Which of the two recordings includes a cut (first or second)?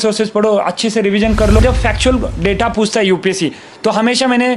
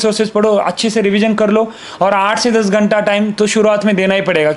first